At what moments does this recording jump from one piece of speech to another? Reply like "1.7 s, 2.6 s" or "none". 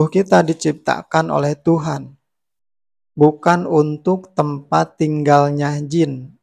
none